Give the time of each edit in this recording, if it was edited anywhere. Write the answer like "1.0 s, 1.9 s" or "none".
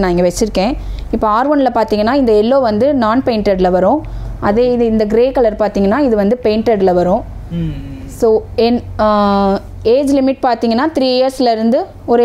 none

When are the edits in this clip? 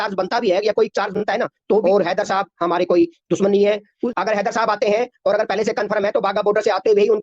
1.8 s, 3.9 s

